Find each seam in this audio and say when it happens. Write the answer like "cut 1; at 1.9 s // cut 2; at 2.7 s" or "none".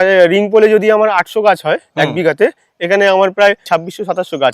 cut 1; at 3.6 s